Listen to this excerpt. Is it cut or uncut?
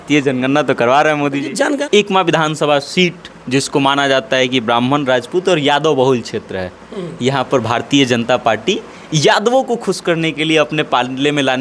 cut